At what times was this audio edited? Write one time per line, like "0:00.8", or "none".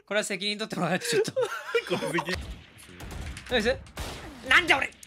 0:02.3